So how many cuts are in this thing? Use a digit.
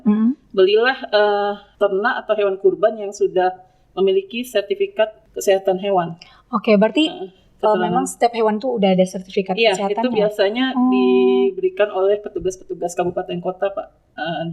2